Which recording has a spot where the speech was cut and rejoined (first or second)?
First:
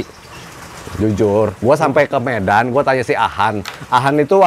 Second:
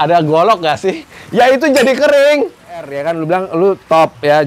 second